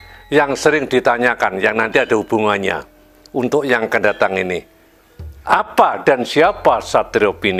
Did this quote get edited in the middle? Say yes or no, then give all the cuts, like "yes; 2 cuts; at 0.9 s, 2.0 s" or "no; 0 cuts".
no; 0 cuts